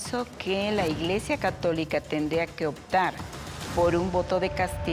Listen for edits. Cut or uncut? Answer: uncut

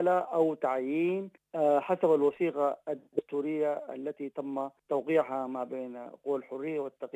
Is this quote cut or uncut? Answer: cut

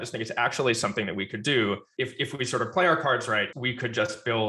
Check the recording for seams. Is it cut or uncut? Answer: cut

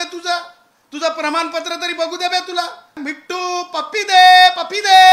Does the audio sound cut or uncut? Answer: cut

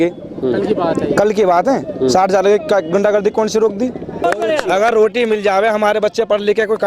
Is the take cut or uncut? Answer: cut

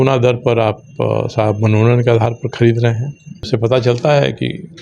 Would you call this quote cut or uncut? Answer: cut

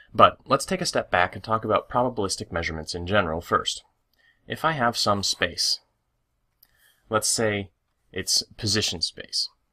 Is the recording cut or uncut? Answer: cut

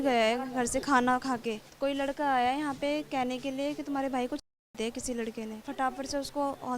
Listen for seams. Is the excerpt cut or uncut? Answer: cut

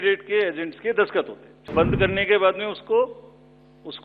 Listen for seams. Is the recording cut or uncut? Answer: cut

